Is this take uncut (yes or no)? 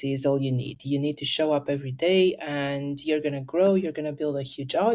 yes